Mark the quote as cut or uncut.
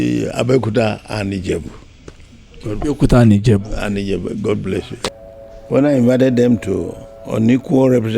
cut